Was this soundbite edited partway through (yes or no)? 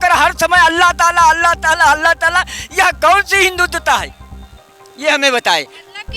no